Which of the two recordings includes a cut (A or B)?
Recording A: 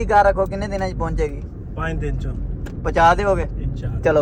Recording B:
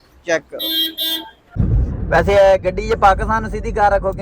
B